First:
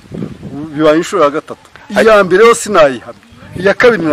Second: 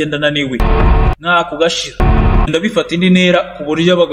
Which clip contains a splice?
second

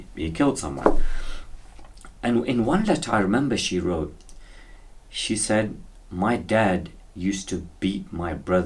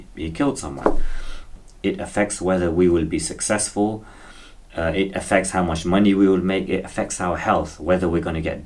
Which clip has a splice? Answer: second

